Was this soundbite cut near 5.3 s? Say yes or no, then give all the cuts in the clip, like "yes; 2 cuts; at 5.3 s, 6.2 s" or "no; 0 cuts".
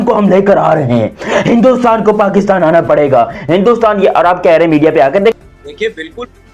yes; 1 cut; at 5.3 s